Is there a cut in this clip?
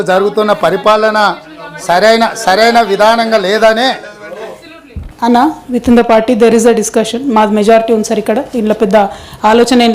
yes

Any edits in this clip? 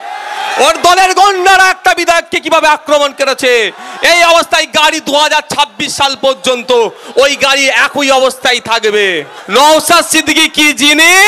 yes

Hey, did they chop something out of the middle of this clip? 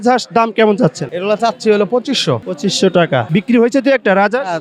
yes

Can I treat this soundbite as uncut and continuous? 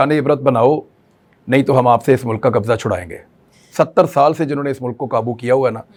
yes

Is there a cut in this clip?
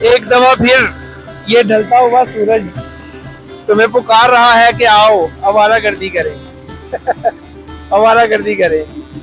no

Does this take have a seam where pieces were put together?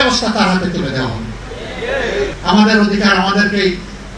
yes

